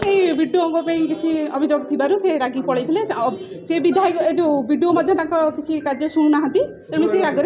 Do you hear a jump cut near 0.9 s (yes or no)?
no